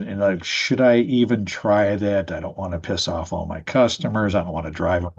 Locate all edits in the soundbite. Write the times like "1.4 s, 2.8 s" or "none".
none